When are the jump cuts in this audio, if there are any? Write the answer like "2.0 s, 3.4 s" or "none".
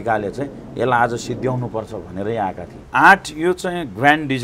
2.7 s

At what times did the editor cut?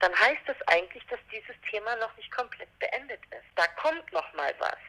3.4 s

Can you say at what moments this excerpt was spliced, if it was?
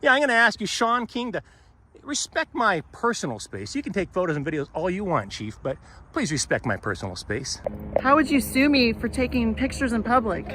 7.5 s

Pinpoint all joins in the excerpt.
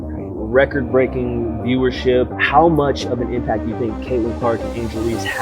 2.3 s

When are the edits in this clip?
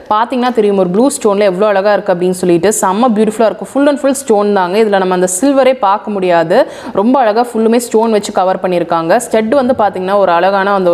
none

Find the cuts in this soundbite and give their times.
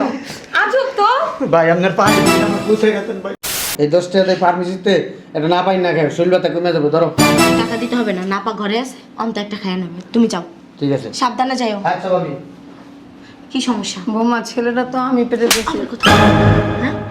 3.7 s

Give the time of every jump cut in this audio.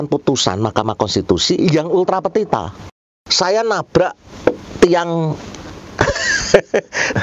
2.9 s

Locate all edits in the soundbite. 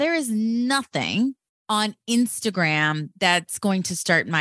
1.5 s

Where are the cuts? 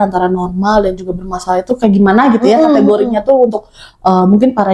none

